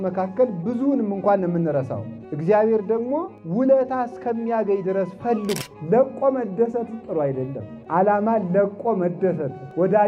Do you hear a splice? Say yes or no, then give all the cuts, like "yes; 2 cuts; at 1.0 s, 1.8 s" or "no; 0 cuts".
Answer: yes; 1 cut; at 5.6 s